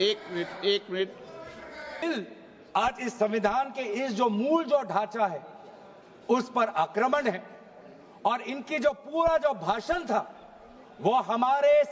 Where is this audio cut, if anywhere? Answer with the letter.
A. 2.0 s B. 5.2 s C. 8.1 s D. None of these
A